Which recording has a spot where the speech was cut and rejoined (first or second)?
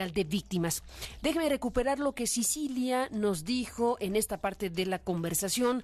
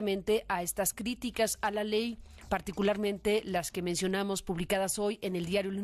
first